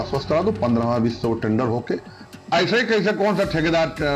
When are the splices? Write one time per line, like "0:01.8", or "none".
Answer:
0:02.1